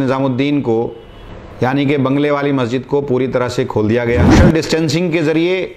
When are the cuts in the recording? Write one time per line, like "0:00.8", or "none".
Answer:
0:04.3